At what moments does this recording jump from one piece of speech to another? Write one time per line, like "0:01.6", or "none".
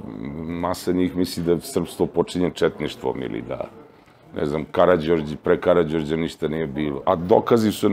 0:07.0